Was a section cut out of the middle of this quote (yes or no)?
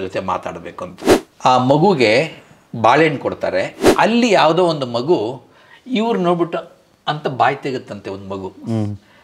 yes